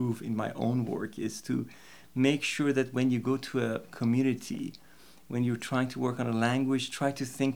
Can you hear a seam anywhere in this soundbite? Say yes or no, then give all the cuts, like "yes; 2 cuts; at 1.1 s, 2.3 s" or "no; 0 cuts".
no; 0 cuts